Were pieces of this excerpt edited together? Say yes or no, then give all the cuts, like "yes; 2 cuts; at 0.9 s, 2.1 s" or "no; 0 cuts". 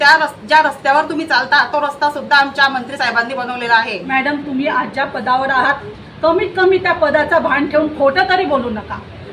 yes; 1 cut; at 4.1 s